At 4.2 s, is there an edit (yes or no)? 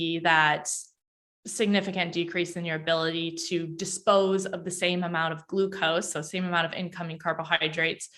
no